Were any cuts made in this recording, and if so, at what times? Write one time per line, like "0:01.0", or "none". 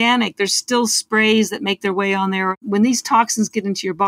0:02.5